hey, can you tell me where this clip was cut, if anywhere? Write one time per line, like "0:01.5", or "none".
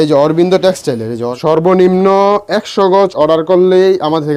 0:01.3